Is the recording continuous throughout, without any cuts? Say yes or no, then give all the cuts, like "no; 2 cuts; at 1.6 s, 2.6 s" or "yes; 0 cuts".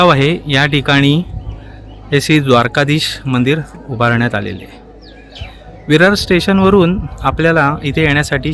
yes; 0 cuts